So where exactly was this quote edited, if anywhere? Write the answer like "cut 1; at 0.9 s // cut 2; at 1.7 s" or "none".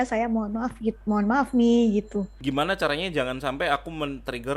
cut 1; at 2.3 s